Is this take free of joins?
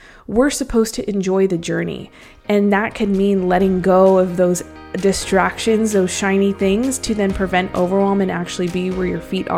yes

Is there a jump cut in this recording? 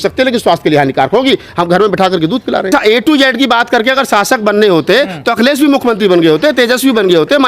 yes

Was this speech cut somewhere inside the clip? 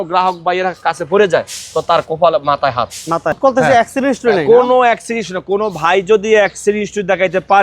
yes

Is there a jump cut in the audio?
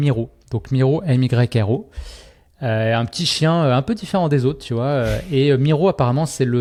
no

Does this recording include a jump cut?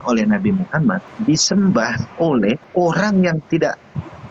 yes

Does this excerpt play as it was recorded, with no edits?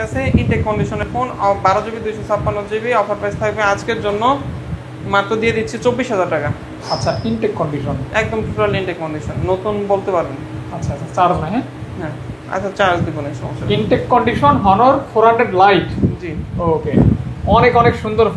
yes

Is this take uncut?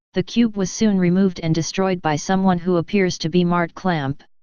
no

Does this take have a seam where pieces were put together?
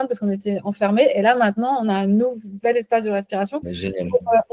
no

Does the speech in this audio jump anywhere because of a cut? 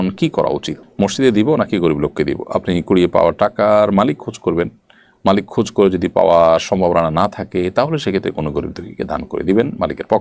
no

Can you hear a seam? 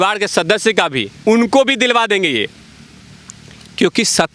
no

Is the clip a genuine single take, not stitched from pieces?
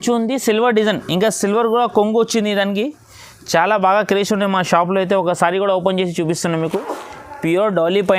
no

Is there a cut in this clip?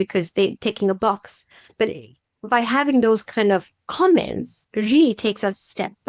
yes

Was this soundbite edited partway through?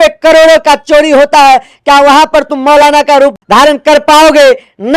yes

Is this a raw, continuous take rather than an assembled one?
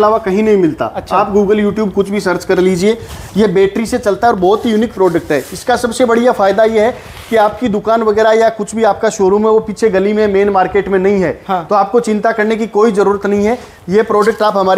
yes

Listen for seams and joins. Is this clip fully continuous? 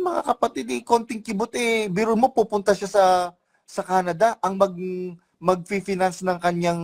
yes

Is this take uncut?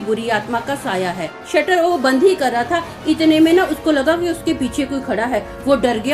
no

